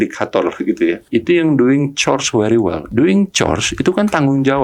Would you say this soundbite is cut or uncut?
cut